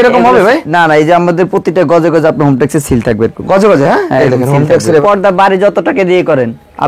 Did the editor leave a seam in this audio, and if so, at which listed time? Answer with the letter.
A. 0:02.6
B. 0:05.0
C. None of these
B